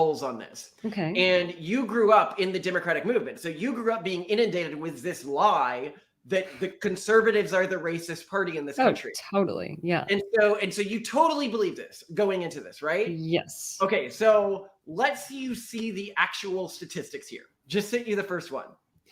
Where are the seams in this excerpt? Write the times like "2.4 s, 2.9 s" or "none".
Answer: none